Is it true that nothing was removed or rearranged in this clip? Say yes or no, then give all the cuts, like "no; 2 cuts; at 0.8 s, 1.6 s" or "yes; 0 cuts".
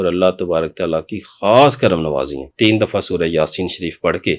no; 1 cut; at 2.4 s